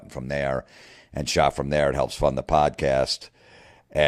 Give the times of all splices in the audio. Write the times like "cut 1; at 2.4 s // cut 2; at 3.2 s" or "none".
cut 1; at 2.7 s